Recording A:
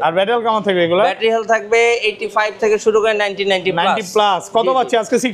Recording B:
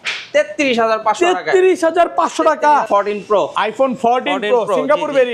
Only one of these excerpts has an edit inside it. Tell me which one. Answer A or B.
B